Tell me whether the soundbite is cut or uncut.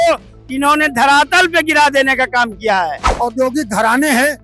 cut